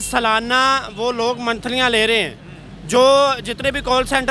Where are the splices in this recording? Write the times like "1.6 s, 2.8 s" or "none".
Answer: none